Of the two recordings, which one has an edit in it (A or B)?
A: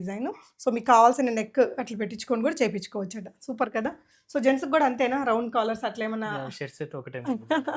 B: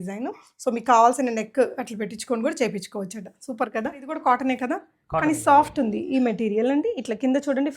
B